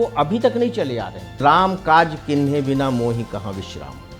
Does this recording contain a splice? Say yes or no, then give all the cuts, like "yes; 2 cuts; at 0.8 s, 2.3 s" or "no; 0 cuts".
yes; 1 cut; at 1.4 s